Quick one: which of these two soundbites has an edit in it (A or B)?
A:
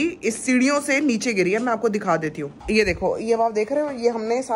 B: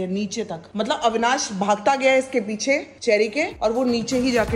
A